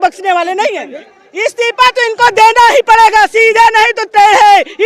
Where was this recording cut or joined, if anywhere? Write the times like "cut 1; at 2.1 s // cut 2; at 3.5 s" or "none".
cut 1; at 1.0 s